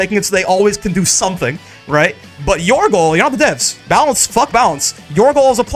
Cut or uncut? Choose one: uncut